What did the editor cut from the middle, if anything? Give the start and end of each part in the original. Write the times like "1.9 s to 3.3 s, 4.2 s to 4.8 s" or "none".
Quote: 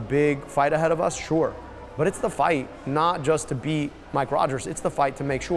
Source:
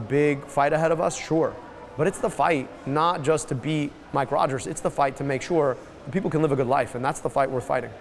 none